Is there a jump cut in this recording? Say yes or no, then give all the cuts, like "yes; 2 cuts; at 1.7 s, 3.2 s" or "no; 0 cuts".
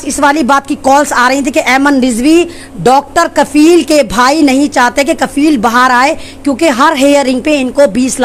no; 0 cuts